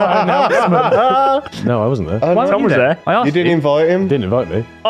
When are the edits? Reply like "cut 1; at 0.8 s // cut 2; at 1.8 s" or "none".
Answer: cut 1; at 1.4 s // cut 2; at 3.0 s